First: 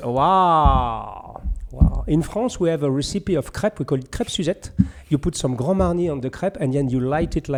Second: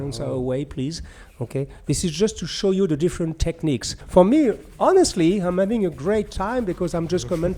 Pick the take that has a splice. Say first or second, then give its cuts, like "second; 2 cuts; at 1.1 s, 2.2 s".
second; 1 cut; at 4.0 s